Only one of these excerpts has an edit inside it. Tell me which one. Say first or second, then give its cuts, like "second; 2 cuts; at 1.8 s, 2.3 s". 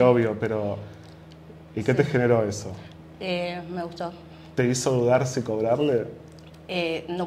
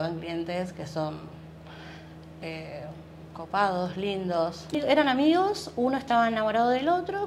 second; 1 cut; at 4.7 s